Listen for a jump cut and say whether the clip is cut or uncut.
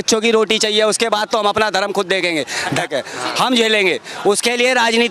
uncut